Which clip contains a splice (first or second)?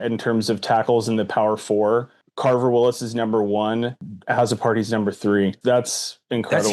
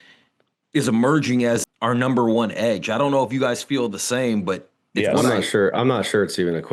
first